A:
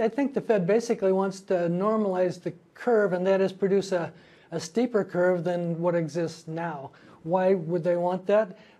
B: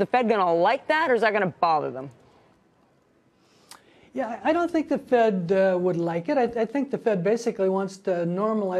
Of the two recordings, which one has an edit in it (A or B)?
A